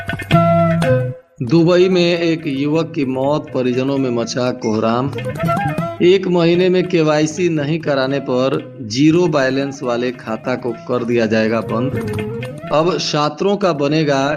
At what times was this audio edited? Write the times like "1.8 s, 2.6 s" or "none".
1.2 s